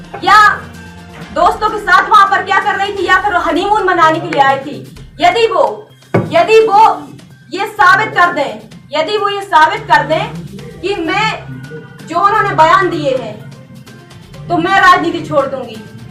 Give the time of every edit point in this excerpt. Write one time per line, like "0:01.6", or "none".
none